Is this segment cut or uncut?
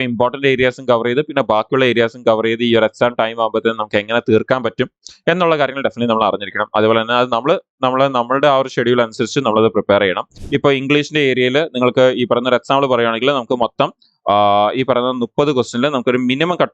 cut